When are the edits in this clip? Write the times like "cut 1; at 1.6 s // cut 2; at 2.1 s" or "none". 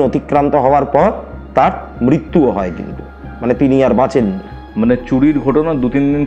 none